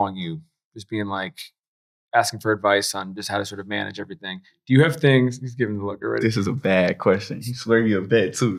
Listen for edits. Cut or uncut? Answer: uncut